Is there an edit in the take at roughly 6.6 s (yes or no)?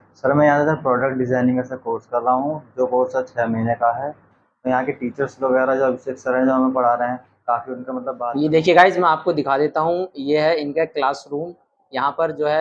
no